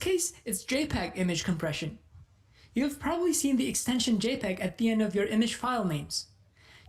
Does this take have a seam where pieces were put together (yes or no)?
no